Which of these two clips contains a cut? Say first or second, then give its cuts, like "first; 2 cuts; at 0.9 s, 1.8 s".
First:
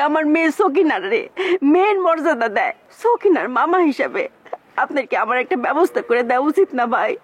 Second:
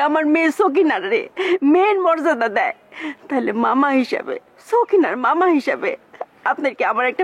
first; 1 cut; at 2.8 s